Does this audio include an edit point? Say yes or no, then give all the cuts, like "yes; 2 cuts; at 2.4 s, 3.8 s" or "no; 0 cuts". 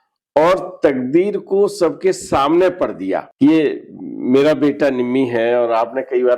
no; 0 cuts